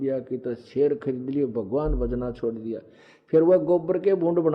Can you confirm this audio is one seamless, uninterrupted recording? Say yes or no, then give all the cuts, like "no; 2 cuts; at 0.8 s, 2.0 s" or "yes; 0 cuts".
yes; 0 cuts